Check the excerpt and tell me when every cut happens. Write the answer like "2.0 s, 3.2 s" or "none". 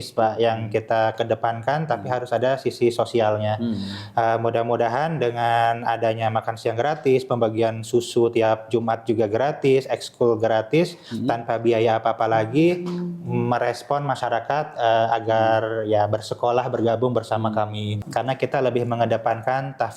18.0 s